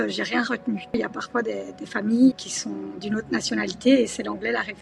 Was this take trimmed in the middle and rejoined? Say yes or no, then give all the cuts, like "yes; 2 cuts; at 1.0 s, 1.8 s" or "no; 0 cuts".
yes; 2 cuts; at 0.9 s, 2.5 s